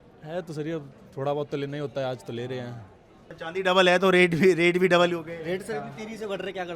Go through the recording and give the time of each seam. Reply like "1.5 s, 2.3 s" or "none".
3.3 s